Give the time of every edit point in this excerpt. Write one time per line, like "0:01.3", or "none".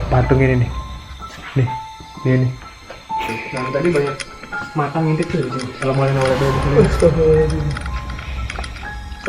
0:03.3